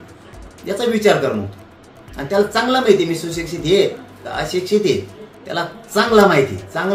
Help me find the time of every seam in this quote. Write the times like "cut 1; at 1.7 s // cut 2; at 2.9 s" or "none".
none